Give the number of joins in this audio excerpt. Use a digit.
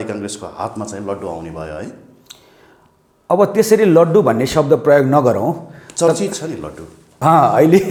0